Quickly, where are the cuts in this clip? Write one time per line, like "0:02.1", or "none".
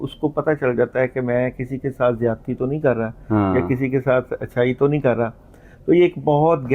none